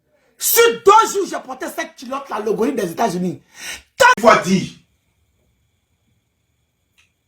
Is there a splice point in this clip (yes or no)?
yes